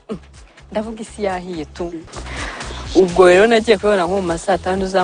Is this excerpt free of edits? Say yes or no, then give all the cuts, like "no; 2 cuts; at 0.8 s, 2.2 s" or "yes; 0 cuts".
no; 1 cut; at 2.0 s